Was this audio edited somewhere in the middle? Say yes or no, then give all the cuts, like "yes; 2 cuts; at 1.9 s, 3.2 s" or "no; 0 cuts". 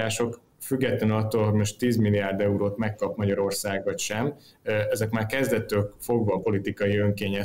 no; 0 cuts